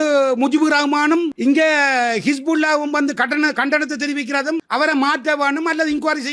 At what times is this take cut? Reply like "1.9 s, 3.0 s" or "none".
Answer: none